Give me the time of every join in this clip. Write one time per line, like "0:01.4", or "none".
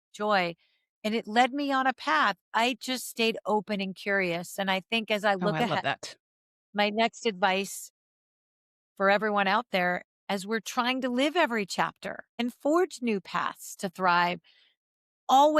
0:12.4